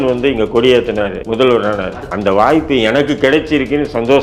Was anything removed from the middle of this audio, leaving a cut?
yes; 2 cuts; at 1.2 s, 2.0 s

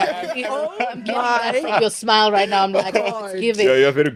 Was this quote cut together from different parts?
no; 0 cuts

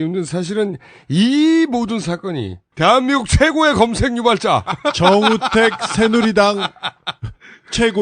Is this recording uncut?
yes; 0 cuts

